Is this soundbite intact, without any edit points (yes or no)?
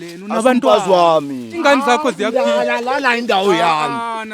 no